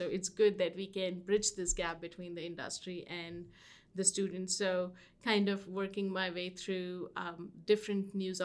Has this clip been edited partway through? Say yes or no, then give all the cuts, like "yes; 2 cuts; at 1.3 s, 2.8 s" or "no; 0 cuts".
no; 0 cuts